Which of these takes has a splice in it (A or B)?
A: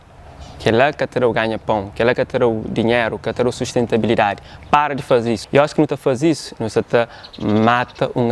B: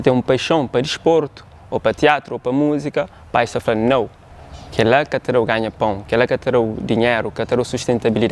A